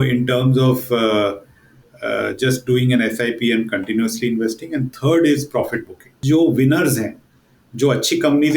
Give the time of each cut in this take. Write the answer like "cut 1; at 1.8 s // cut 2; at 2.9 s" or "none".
cut 1; at 6.1 s